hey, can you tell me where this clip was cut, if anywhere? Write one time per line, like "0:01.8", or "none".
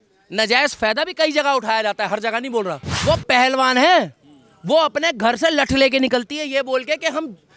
0:02.8